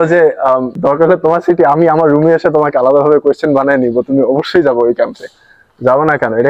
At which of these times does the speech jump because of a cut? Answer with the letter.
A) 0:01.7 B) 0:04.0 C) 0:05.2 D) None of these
D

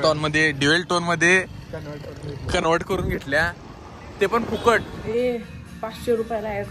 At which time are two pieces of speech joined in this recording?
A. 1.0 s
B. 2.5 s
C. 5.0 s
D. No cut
C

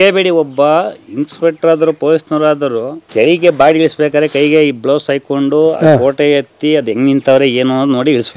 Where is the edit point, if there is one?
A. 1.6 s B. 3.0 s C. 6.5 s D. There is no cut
B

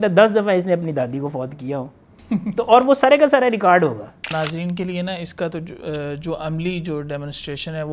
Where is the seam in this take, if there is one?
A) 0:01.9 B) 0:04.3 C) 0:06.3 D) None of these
B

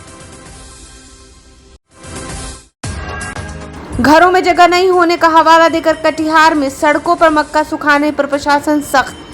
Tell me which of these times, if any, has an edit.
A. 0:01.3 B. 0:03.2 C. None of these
A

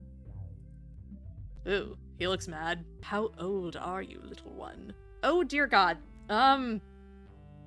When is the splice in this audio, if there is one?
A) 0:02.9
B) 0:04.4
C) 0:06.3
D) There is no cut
A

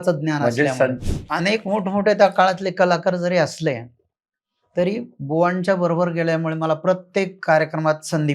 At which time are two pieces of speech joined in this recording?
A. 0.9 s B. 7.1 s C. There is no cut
A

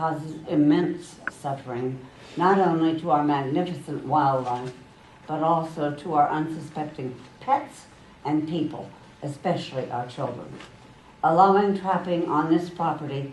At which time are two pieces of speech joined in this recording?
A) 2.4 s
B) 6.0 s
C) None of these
B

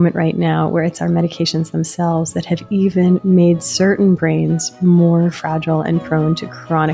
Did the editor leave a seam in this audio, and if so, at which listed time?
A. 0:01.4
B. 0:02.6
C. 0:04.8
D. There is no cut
D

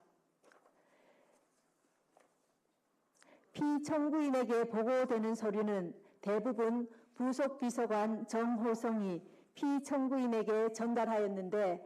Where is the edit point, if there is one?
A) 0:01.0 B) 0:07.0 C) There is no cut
C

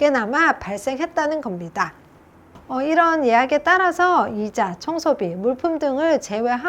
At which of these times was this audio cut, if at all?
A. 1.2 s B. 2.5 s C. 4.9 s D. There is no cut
B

